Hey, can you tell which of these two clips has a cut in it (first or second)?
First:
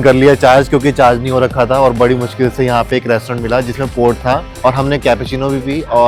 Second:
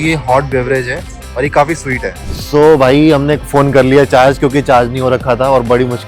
second